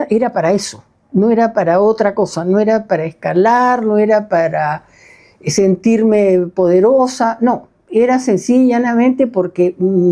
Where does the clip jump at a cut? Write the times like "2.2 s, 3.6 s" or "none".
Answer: none